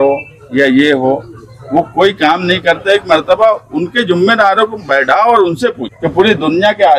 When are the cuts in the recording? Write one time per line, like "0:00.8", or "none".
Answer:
0:05.9